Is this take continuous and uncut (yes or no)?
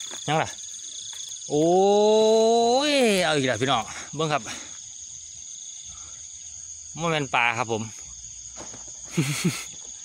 yes